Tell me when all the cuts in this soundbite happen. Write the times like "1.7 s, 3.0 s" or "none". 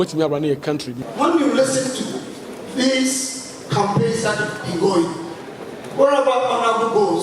0.9 s